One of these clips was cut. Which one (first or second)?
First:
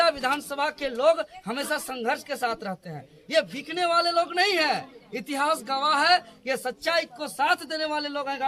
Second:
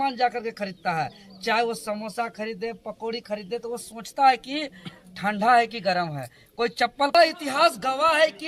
second